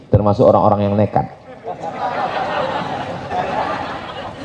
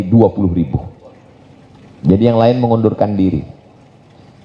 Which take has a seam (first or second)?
first